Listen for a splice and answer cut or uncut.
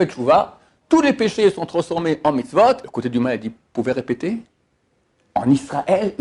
cut